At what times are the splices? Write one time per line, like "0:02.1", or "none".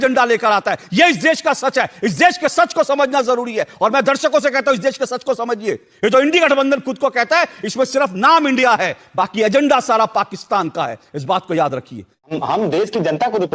0:12.3